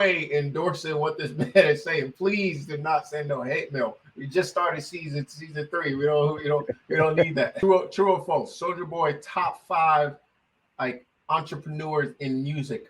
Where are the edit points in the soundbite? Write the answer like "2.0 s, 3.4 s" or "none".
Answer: 7.5 s